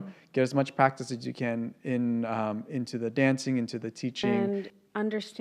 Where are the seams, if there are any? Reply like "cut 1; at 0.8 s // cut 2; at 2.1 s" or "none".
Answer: cut 1; at 4.3 s

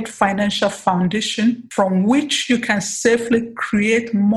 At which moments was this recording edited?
cut 1; at 1.6 s

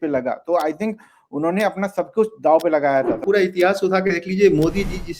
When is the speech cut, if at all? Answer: cut 1; at 3.2 s

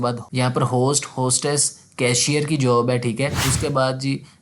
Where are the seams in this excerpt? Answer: cut 1; at 3.5 s

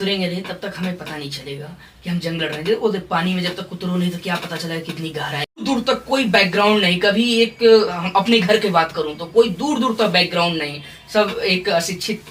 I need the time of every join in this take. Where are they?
cut 1; at 5.6 s

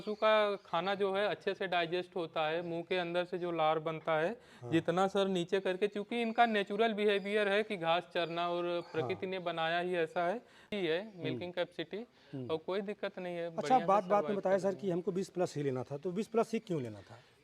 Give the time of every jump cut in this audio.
cut 1; at 10.7 s

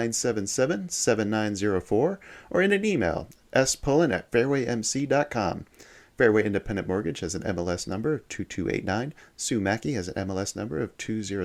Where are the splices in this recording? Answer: none

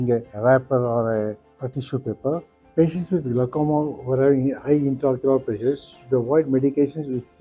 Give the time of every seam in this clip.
cut 1; at 2.6 s

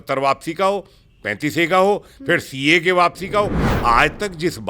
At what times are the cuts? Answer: cut 1; at 3.7 s

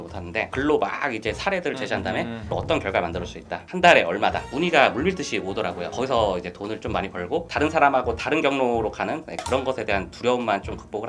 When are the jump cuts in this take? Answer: cut 1; at 4.4 s // cut 2; at 7.5 s

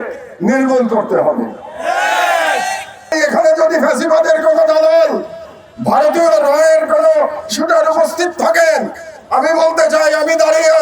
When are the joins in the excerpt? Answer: cut 1; at 3.2 s

